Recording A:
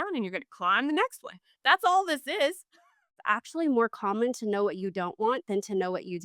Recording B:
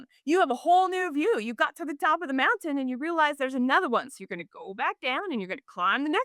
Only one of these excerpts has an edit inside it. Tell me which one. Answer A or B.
A